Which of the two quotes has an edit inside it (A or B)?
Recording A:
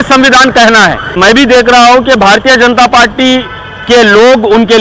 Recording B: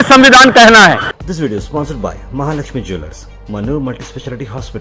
A